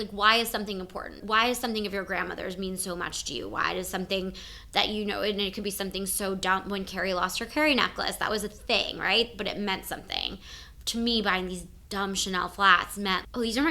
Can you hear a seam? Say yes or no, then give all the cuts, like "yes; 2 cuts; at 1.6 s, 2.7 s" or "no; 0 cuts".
yes; 1 cut; at 1.2 s